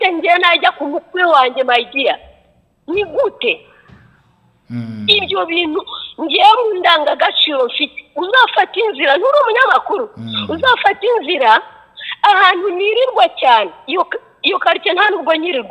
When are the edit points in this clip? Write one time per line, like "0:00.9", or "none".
none